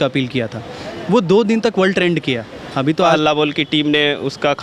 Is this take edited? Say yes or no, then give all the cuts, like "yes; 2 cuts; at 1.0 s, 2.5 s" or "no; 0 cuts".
yes; 1 cut; at 3.1 s